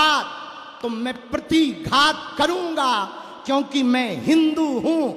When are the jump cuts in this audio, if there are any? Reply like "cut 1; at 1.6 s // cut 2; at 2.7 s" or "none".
none